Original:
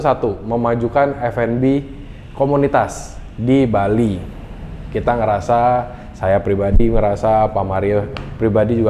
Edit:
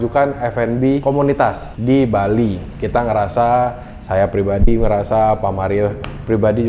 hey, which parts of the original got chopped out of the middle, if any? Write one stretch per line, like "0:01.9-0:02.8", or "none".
0:02.2-0:03.0
0:04.3-0:04.8